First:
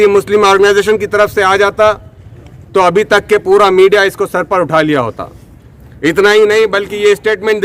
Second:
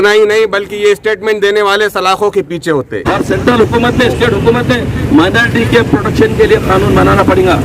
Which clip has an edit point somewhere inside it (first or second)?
second